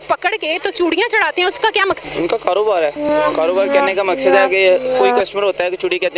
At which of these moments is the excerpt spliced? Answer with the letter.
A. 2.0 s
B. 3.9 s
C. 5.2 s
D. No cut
A